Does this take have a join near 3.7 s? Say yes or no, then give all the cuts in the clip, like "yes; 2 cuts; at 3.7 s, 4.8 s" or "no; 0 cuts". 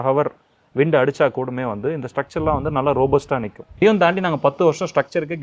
yes; 1 cut; at 3.7 s